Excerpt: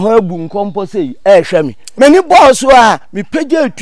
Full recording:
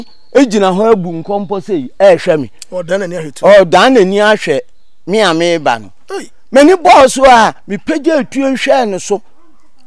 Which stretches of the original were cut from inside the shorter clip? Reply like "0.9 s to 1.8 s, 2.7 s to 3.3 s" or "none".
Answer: 2.6 s to 6.4 s